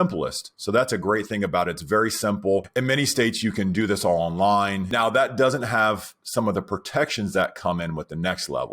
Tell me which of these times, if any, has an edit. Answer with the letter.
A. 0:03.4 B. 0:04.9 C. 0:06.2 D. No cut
B